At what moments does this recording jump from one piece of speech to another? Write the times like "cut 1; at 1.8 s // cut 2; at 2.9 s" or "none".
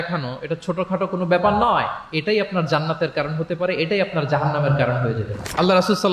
none

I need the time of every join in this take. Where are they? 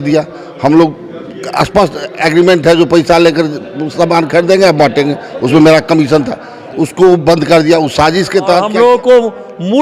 cut 1; at 8.7 s

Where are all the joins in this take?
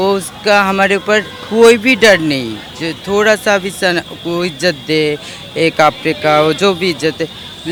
none

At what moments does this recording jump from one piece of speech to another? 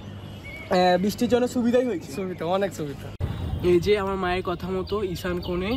cut 1; at 3.1 s

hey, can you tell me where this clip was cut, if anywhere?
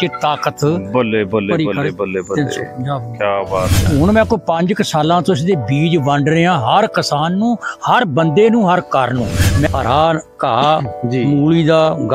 cut 1; at 3.8 s // cut 2; at 9.7 s

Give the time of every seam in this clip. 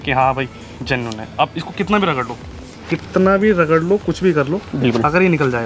none

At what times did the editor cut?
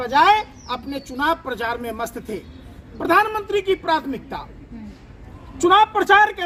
none

